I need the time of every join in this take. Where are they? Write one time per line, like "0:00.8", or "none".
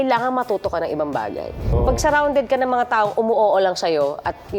0:01.7